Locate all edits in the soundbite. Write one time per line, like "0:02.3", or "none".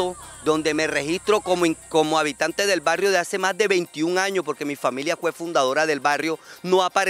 none